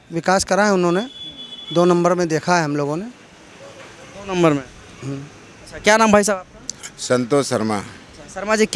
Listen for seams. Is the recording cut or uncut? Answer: uncut